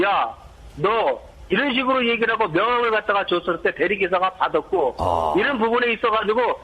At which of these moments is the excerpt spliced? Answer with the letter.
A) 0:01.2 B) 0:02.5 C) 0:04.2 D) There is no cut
B